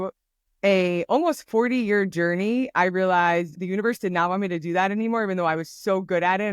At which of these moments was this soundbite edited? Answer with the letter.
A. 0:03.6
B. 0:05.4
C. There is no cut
A